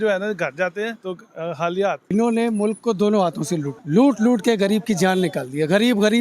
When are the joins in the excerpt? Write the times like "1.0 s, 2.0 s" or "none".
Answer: 1.0 s, 2.1 s, 3.8 s